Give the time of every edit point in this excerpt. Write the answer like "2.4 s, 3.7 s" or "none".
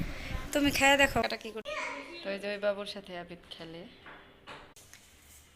1.2 s